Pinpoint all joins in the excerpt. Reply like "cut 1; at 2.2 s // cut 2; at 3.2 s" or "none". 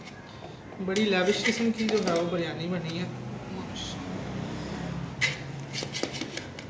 none